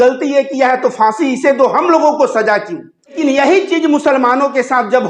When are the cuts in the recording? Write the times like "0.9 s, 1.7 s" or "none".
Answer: 3.2 s